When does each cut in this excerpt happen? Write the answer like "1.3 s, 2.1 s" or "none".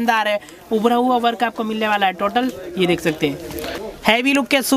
3.8 s

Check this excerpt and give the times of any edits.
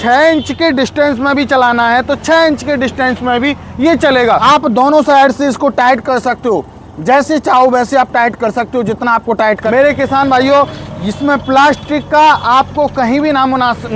4.4 s, 9.6 s

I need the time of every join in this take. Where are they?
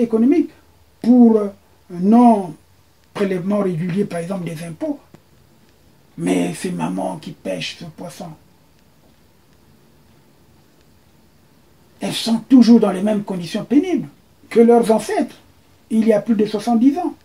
5.1 s

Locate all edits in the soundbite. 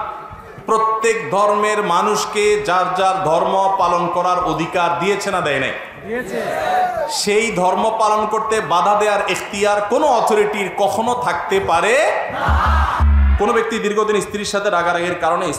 13.0 s

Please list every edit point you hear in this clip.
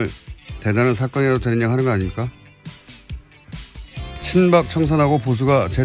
1.5 s

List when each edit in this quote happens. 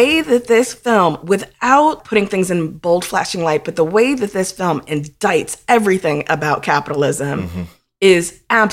2.0 s

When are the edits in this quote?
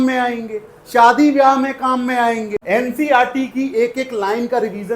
2.6 s

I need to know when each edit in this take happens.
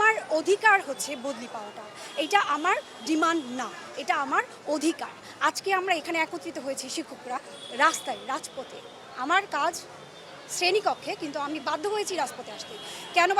none

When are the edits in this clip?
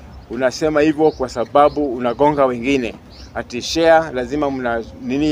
none

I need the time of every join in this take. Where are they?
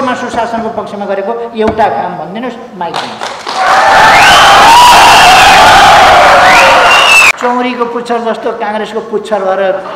7.3 s

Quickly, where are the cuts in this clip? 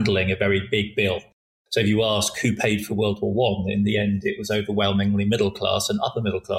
none

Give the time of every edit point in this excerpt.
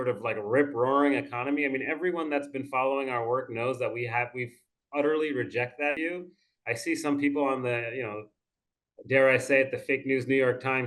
6.0 s

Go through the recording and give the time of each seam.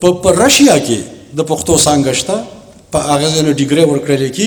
none

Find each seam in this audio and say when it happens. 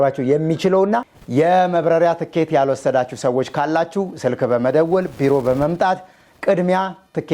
1.2 s

